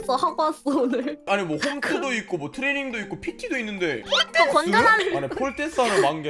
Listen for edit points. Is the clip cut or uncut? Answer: cut